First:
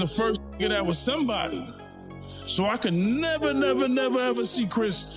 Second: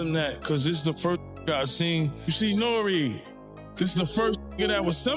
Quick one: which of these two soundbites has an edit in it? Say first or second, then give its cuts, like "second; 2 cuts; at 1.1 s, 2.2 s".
second; 1 cut; at 2.3 s